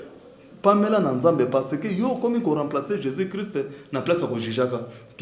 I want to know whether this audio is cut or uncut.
uncut